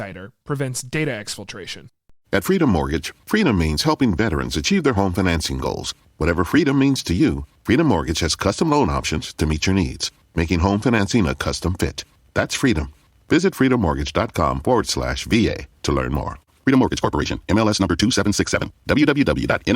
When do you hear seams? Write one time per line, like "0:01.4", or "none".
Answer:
0:02.1